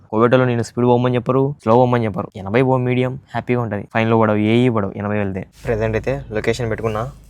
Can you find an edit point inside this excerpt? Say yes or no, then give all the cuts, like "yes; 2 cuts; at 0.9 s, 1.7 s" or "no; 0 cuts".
yes; 4 cuts; at 1.6 s, 2.3 s, 3.8 s, 5.5 s